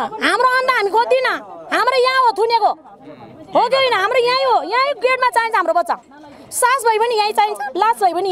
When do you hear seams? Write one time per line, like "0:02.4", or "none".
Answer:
none